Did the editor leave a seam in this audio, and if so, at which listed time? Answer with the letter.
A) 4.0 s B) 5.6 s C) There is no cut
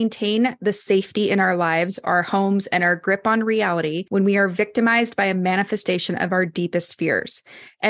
A